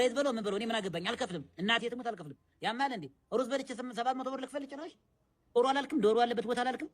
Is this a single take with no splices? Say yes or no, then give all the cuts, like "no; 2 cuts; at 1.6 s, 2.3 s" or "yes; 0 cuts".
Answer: no; 1 cut; at 5.6 s